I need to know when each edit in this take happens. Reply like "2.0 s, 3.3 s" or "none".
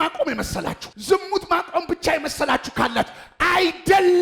none